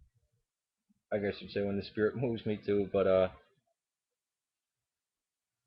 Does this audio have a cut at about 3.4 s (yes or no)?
no